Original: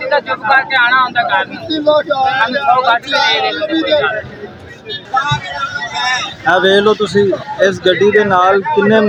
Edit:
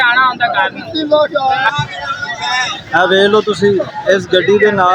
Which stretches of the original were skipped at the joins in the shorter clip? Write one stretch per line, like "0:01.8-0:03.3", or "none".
0:02.5-0:05.3